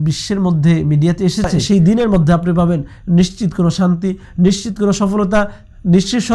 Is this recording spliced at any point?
yes; 1 cut; at 1.6 s

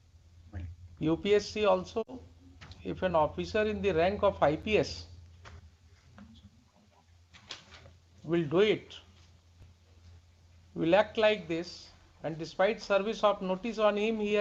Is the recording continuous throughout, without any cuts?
yes; 0 cuts

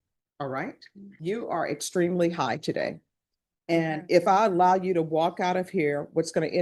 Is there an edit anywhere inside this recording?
yes; 1 cut; at 1.0 s

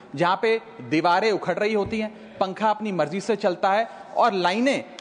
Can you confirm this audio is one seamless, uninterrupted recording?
yes; 0 cuts

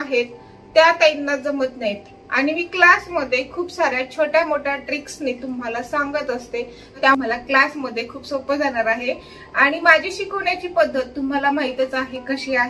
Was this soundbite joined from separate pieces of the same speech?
no; 0 cuts

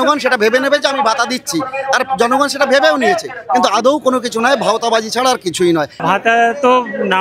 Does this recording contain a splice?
yes; 1 cut; at 6.0 s

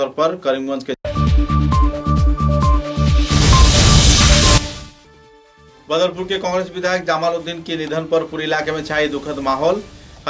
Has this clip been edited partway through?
yes; 2 cuts; at 1.0 s, 4.7 s

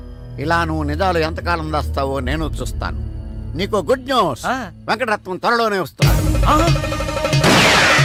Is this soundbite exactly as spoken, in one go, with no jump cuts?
yes; 0 cuts

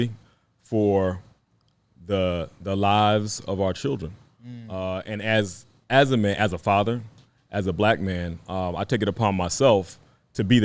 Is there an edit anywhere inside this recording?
no; 0 cuts

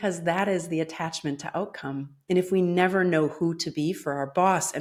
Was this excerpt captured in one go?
yes; 0 cuts

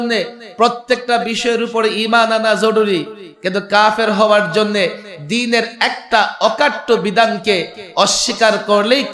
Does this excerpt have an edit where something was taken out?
no; 0 cuts

